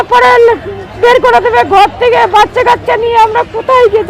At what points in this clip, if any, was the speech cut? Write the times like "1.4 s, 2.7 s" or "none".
none